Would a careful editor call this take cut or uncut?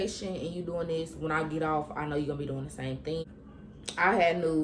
cut